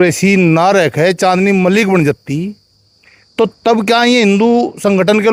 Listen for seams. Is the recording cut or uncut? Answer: uncut